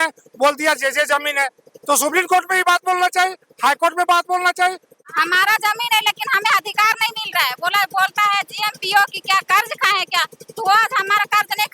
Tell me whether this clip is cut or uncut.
cut